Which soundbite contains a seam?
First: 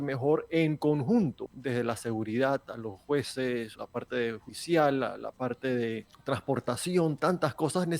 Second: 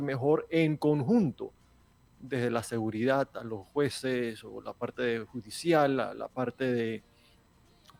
first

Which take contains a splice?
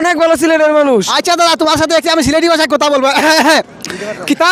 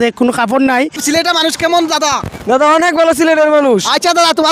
second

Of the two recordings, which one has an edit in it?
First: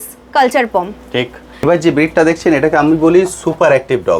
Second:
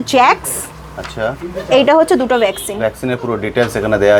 first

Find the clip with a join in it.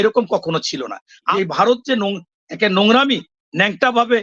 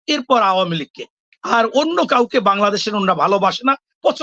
first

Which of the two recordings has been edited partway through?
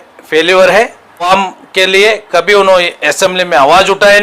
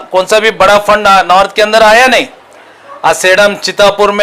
first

